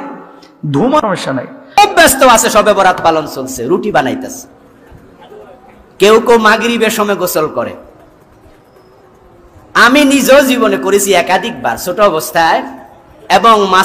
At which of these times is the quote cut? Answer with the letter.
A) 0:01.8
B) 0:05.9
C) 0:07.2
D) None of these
A